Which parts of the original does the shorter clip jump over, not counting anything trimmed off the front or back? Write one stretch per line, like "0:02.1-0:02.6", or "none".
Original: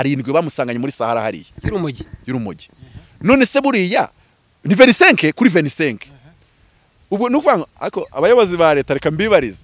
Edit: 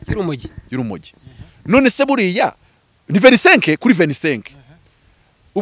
none